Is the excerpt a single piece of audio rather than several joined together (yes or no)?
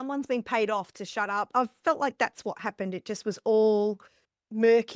no